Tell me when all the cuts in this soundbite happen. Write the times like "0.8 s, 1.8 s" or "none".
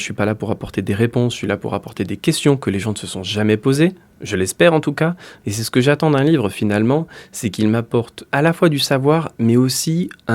8.2 s